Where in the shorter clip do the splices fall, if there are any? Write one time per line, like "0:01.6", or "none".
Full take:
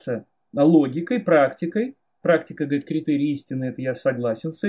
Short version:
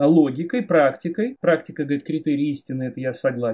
0:01.4